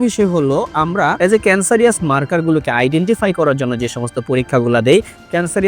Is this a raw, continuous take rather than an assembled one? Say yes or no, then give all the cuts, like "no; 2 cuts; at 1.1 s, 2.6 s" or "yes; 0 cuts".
no; 1 cut; at 1.2 s